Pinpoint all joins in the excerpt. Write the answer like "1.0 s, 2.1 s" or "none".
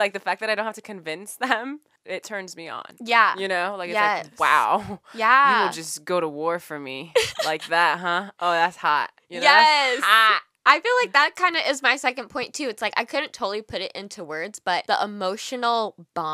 1.9 s, 14.8 s